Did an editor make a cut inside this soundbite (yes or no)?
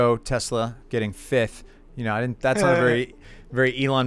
no